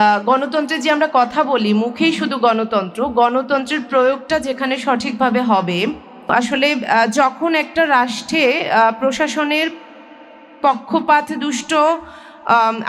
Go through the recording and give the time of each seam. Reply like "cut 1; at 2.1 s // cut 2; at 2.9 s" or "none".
cut 1; at 6.3 s